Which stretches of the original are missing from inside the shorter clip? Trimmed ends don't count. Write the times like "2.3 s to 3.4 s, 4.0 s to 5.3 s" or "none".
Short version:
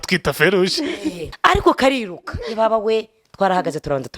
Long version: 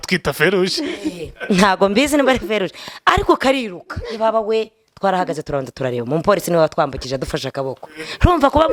1.2 s to 2.9 s